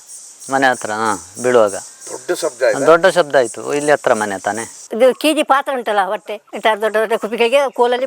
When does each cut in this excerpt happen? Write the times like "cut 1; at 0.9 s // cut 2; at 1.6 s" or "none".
cut 1; at 4.8 s